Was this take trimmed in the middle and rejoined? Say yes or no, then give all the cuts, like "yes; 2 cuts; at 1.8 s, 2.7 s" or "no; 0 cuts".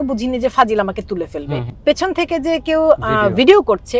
yes; 1 cut; at 1.7 s